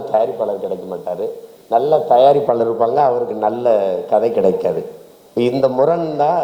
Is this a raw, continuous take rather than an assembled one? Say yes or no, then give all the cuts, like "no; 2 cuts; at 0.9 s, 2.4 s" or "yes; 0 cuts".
yes; 0 cuts